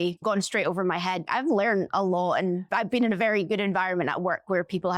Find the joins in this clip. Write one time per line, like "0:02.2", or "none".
0:01.2